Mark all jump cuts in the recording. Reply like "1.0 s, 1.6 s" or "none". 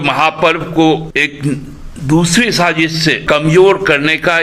1.1 s, 3.2 s